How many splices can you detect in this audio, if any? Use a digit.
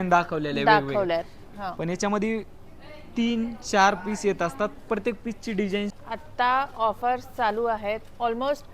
1